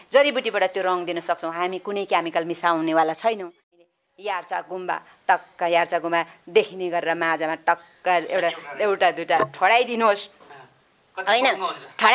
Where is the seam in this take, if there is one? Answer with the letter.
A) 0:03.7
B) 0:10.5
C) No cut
A